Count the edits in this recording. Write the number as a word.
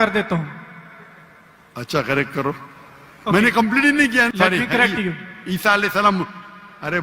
one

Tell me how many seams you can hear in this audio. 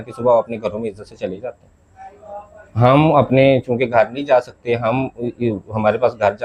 zero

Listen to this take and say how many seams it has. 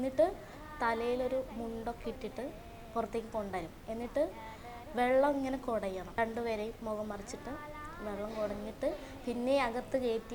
one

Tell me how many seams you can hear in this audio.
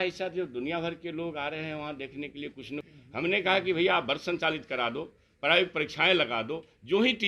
one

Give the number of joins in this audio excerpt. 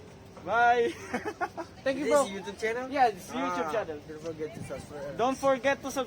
one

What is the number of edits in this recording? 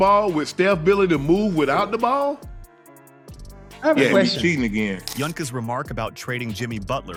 zero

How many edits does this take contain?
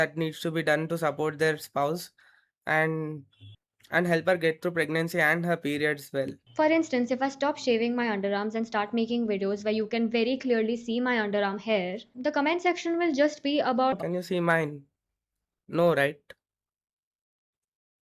one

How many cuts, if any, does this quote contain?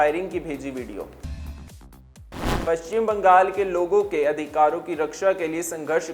two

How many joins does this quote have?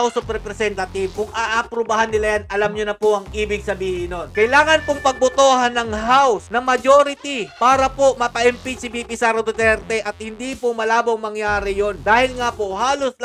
one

